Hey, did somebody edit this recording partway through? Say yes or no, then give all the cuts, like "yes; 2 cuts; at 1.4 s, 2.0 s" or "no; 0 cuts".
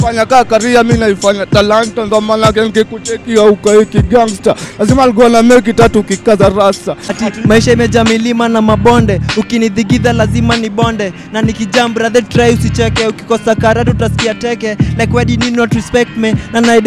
yes; 1 cut; at 7.1 s